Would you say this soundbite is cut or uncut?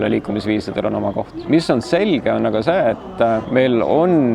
cut